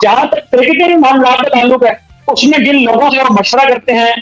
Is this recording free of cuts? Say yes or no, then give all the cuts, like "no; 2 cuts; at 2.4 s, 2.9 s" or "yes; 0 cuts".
yes; 0 cuts